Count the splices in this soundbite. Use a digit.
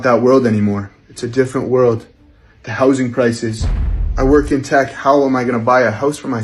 0